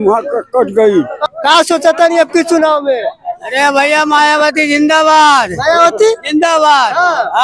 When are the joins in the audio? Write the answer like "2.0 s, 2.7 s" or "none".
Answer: 1.2 s